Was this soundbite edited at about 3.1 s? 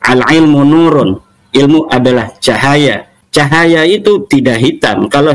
yes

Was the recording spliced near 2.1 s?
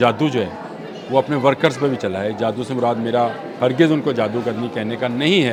no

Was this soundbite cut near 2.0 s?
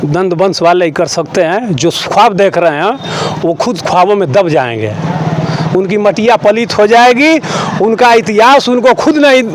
no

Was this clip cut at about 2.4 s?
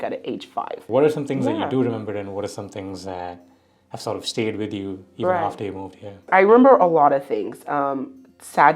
no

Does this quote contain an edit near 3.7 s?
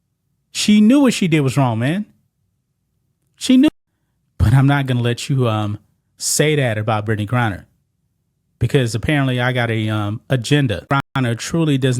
yes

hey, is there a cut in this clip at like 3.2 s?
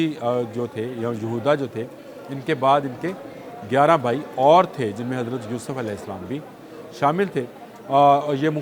no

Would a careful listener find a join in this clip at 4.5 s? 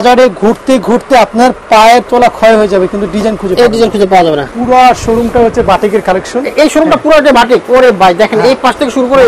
yes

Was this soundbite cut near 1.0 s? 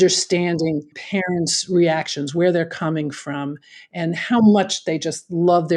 yes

